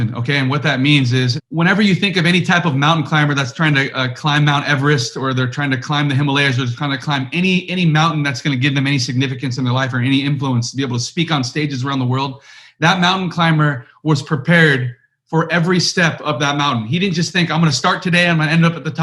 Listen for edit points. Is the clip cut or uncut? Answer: cut